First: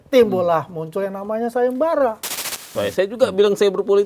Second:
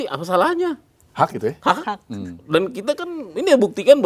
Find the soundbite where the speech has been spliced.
first; 1 cut; at 2.7 s

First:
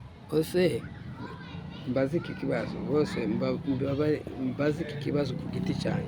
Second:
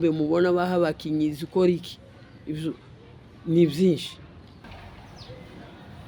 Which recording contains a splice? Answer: second; 1 cut; at 4.6 s

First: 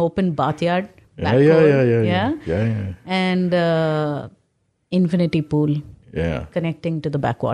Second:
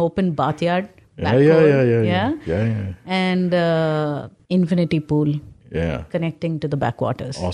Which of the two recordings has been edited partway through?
second; 1 cut; at 4.3 s

